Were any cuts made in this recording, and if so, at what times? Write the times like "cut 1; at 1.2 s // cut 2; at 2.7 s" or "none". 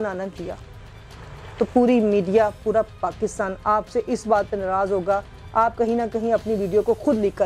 none